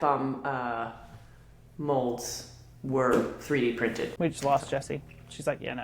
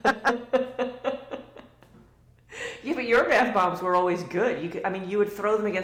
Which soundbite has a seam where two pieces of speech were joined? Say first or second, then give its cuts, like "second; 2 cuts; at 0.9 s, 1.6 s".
first; 1 cut; at 4.1 s